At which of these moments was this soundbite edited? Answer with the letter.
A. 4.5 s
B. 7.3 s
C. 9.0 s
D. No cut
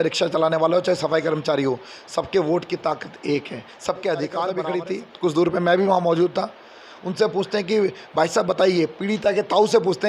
A